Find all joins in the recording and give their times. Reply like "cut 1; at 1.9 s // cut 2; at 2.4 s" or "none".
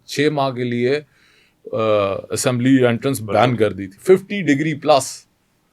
cut 1; at 3.9 s